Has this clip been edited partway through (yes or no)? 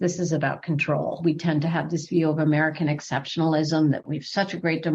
yes